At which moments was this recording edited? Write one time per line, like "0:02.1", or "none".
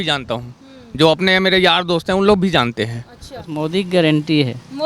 0:03.5